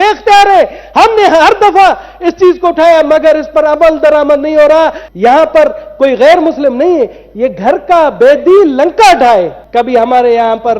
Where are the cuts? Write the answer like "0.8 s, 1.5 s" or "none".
5.0 s, 9.6 s